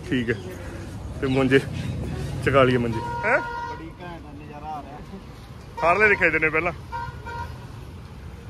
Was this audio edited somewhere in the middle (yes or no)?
yes